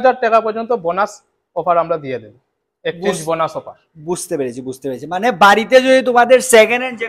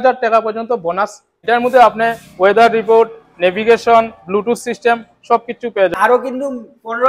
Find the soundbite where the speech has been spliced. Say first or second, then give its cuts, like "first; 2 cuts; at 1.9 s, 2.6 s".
second; 2 cuts; at 1.3 s, 5.9 s